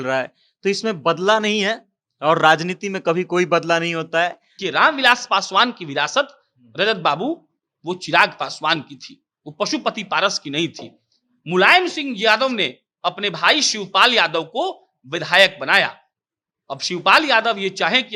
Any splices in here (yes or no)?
yes